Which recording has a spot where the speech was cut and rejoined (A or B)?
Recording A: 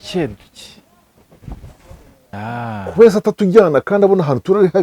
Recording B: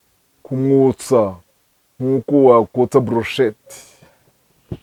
A